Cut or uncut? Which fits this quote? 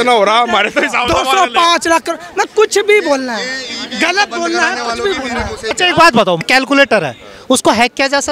cut